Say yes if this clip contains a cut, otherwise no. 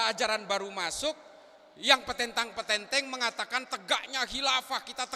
no